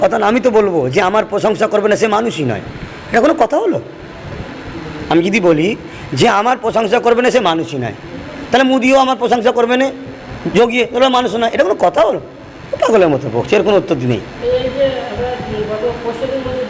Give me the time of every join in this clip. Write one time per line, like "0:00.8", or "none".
none